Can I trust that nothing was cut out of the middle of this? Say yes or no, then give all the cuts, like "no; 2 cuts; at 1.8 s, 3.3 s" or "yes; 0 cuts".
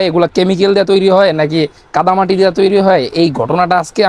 yes; 0 cuts